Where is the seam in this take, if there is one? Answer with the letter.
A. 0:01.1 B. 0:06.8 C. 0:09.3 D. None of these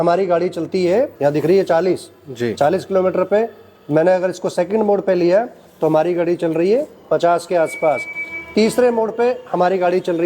A